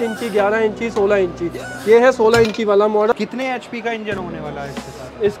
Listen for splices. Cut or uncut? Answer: cut